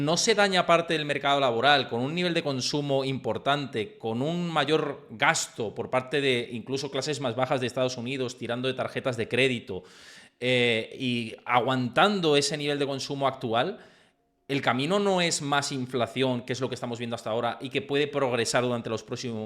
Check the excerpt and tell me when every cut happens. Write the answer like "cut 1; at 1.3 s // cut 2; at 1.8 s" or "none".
none